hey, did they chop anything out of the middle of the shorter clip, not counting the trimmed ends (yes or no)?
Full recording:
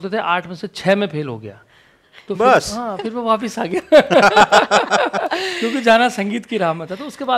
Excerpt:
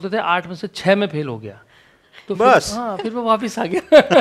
no